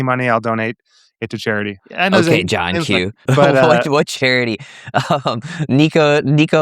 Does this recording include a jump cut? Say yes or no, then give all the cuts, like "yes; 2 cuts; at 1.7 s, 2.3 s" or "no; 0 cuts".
yes; 2 cuts; at 1.8 s, 3.2 s